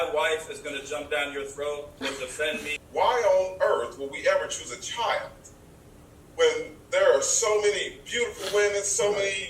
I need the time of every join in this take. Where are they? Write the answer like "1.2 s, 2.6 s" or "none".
2.7 s